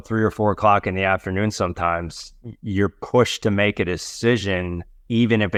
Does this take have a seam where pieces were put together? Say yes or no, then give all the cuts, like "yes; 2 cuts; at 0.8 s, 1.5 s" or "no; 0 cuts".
no; 0 cuts